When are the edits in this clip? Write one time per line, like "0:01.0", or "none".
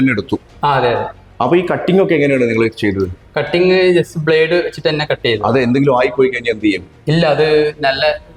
none